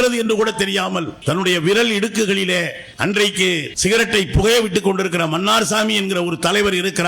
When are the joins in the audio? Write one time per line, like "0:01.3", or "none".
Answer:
0:01.1
0:02.8
0:03.7